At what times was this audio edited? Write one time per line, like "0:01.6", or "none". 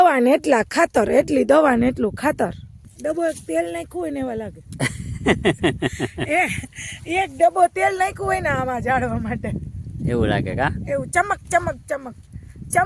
0:02.8

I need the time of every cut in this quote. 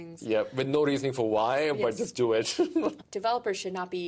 0:03.0

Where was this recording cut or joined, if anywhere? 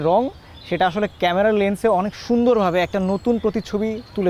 none

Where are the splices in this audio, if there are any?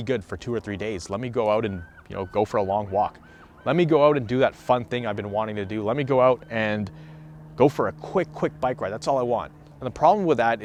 none

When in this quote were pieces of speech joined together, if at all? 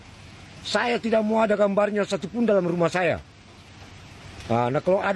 none

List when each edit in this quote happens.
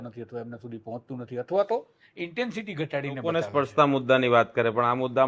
0:03.3

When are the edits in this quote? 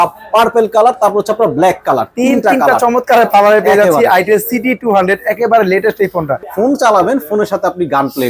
0:06.4

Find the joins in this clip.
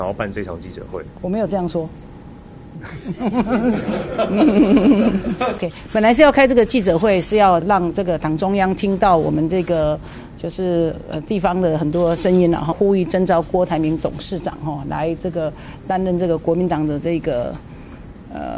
0:05.7
0:07.6
0:12.7

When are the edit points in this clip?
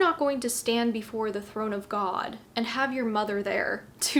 none

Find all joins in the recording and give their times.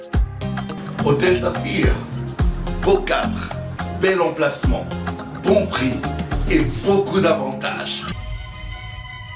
0:08.1

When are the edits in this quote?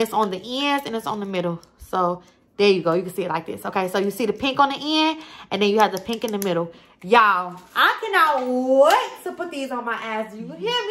none

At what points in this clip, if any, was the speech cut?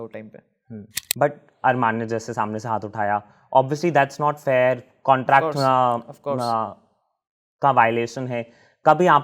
0:00.9

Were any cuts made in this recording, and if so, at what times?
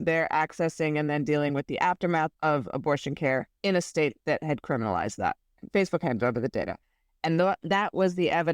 0:02.3
0:05.5
0:06.8

